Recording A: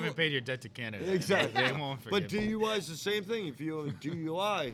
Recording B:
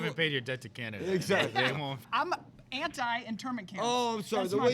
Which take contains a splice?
B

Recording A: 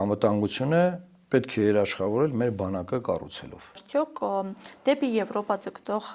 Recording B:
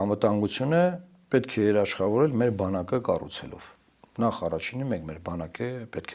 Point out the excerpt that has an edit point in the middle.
A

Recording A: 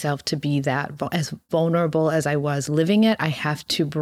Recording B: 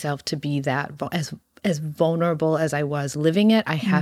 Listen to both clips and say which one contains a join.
A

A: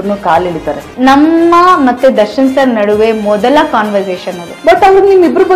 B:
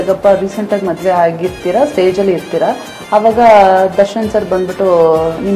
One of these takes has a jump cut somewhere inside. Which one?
A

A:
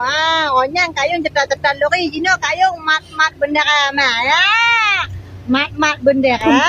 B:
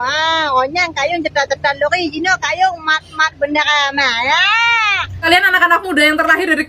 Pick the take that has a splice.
B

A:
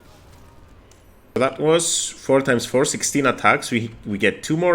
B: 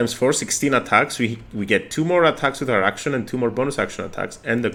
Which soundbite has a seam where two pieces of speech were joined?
A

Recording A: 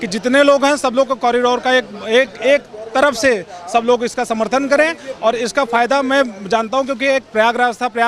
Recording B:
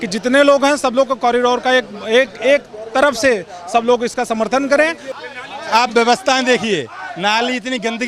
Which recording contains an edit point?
B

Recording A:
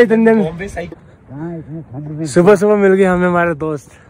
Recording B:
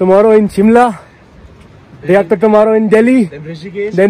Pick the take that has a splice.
A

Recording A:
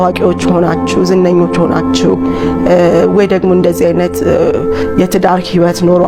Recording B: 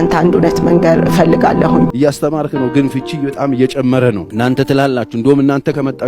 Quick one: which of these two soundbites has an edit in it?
B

